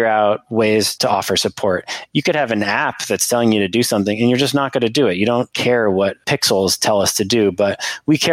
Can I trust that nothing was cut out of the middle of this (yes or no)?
no